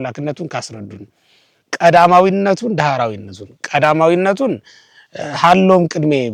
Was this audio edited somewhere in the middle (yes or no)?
no